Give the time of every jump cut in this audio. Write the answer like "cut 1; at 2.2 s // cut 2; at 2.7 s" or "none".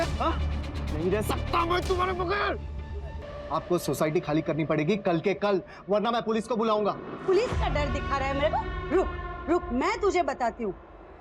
cut 1; at 3.2 s